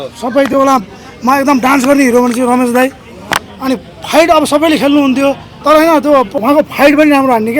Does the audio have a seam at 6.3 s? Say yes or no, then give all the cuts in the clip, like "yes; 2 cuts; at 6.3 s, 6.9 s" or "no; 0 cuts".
yes; 2 cuts; at 5.5 s, 6.3 s